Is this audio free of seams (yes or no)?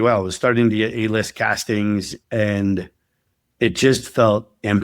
no